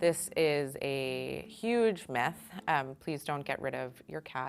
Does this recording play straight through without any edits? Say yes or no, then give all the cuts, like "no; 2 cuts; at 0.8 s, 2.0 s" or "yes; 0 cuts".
yes; 0 cuts